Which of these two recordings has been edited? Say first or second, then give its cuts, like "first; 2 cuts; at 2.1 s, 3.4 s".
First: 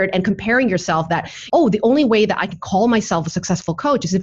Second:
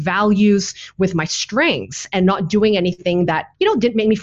first; 1 cut; at 1.4 s